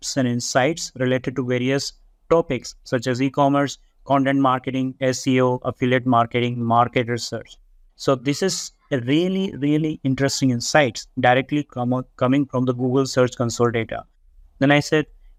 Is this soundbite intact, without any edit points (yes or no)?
yes